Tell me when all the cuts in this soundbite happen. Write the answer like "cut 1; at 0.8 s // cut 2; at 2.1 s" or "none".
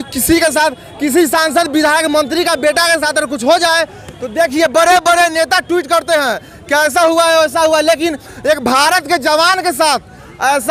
none